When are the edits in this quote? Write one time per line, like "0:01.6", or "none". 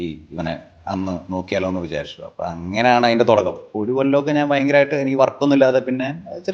0:03.7